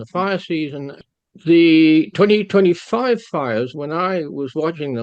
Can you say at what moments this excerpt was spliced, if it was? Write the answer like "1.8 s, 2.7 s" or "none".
1.0 s